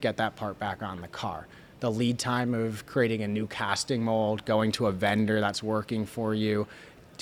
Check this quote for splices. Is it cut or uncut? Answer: uncut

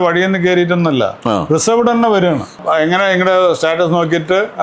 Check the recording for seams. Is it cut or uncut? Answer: cut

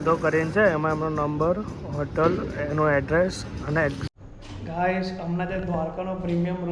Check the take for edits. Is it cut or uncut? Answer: cut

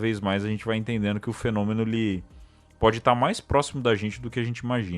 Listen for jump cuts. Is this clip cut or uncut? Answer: uncut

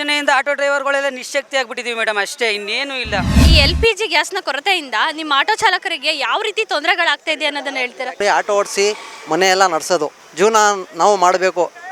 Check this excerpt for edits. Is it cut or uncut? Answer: cut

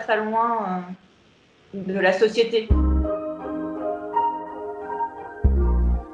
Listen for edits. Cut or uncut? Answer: cut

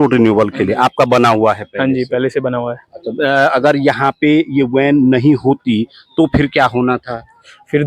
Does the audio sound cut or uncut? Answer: uncut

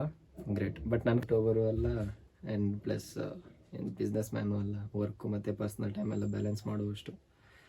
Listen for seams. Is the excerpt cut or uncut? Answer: cut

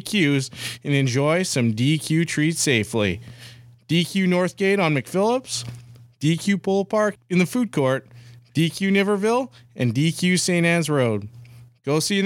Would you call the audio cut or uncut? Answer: cut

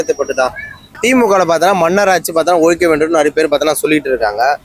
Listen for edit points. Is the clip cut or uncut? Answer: cut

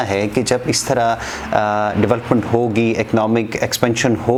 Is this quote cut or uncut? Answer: uncut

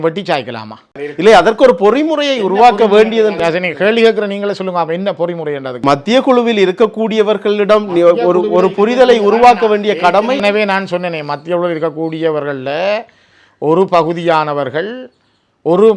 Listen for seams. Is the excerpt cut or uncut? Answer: uncut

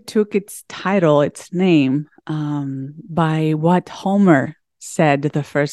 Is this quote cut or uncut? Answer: uncut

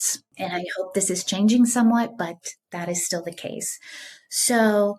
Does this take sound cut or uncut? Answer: uncut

